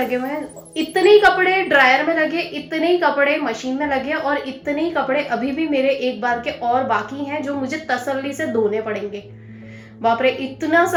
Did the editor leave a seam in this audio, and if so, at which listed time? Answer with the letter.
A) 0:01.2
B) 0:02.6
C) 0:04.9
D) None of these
D